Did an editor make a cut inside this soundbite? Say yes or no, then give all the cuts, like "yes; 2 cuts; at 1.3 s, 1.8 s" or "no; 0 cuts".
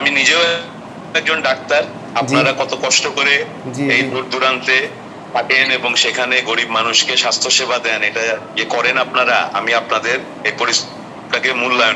no; 0 cuts